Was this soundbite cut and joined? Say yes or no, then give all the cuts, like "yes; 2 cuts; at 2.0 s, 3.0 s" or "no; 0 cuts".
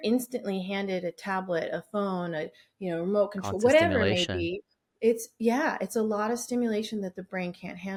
no; 0 cuts